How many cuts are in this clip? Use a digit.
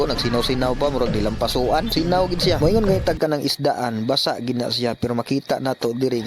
1